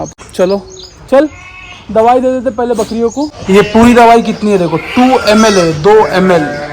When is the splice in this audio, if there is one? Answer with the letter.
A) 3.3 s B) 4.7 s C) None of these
A